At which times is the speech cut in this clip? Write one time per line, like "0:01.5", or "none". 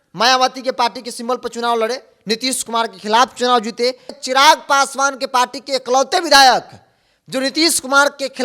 0:04.2